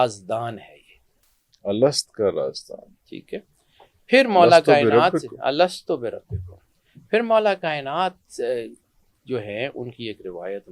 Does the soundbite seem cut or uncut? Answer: uncut